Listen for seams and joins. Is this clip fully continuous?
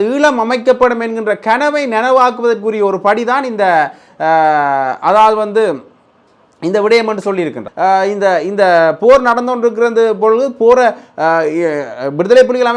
no; 1 cut; at 7.7 s

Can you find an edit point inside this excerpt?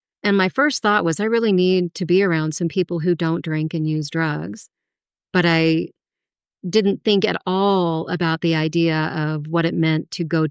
no; 0 cuts

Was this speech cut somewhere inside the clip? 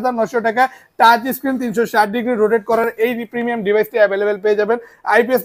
no; 0 cuts

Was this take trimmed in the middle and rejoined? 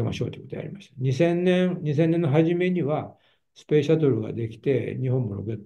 no; 0 cuts

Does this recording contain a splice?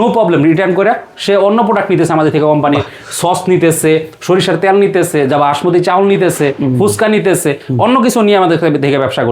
no; 0 cuts

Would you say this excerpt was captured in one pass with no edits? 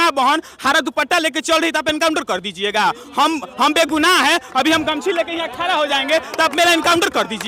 yes; 0 cuts

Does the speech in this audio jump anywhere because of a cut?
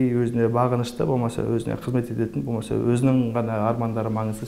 no; 0 cuts

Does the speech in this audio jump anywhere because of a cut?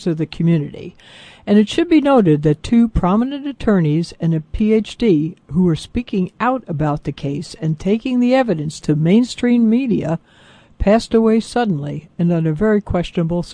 yes; 1 cut; at 5.8 s

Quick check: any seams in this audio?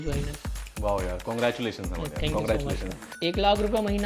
yes; 1 cut; at 3.1 s

